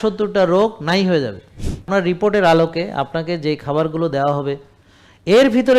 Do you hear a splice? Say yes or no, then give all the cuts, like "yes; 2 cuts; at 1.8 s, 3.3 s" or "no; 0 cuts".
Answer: yes; 1 cut; at 1.9 s